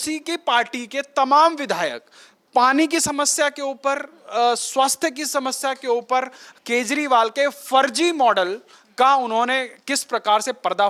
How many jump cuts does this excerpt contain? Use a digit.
0